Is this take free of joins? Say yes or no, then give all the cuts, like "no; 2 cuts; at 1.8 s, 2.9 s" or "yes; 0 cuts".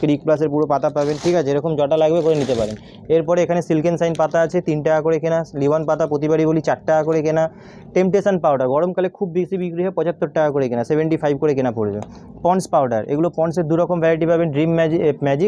yes; 0 cuts